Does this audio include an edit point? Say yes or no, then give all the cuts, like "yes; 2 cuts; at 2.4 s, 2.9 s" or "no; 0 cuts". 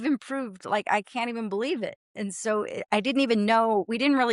no; 0 cuts